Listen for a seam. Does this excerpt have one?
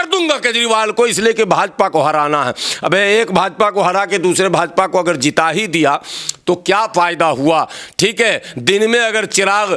no; 0 cuts

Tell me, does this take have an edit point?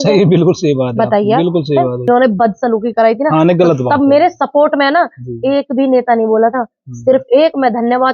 yes; 1 cut; at 2.1 s

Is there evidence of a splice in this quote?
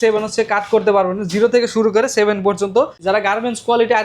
yes; 1 cut; at 3.0 s

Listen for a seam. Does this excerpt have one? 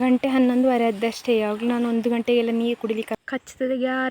yes; 1 cut; at 3.2 s

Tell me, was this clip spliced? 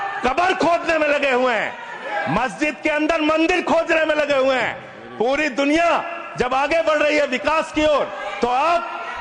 no; 0 cuts

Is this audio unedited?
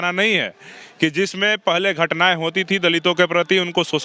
yes; 0 cuts

